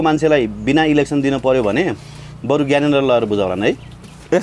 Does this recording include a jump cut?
no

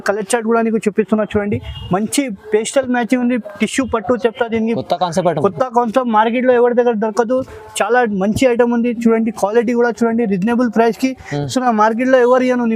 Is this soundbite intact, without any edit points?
yes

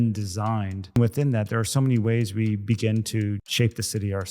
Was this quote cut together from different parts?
yes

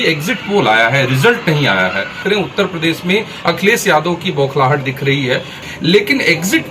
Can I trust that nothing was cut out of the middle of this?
no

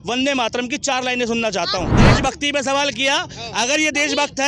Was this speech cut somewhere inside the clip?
yes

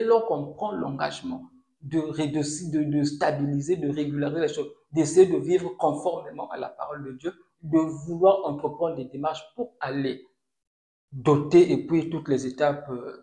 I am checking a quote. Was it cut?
no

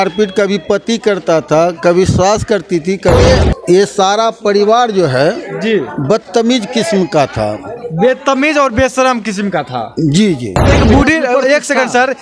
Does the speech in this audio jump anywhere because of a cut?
yes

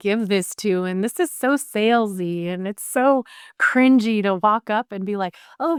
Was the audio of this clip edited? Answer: no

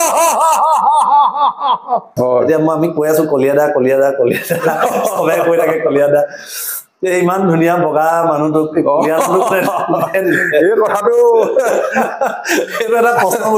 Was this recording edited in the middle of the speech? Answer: yes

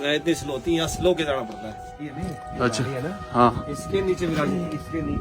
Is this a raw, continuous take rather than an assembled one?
no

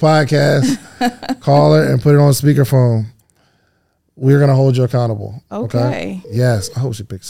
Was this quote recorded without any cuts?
no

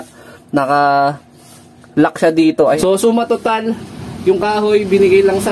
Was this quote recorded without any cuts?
no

